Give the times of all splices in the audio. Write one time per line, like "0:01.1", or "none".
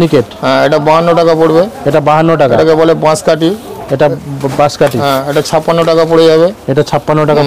none